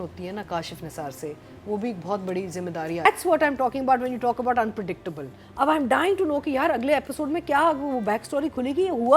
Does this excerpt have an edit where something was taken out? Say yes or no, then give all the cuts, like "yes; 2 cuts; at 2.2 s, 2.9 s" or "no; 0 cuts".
yes; 1 cut; at 3.1 s